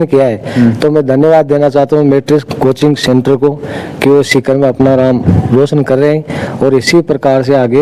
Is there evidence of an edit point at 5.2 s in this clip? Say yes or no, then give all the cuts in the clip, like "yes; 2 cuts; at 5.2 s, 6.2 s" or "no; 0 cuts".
no; 0 cuts